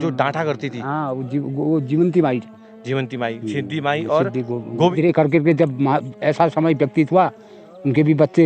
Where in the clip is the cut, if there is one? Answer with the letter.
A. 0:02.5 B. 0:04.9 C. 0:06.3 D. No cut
B